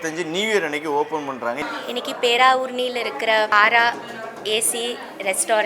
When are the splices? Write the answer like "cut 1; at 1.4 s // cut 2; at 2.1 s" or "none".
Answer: cut 1; at 1.6 s // cut 2; at 3.5 s